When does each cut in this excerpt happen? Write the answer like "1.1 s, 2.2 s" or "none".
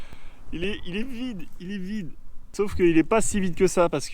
2.5 s